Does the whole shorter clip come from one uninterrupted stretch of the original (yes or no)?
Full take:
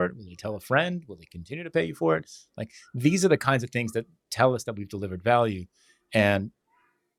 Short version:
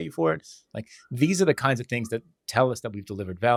yes